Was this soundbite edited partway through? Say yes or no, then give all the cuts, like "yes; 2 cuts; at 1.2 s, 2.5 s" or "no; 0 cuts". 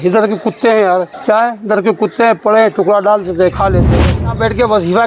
yes; 2 cuts; at 1.1 s, 3.9 s